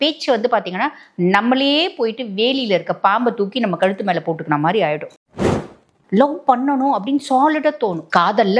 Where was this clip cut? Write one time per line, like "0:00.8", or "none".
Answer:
0:05.6